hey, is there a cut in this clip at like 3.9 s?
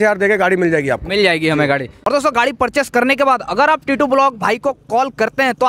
no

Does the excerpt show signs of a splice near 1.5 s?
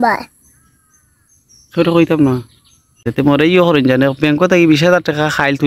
no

